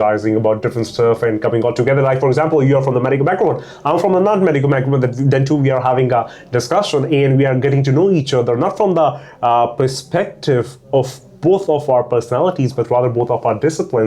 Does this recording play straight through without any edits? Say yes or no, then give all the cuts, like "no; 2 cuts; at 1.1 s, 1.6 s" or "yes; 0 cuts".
yes; 0 cuts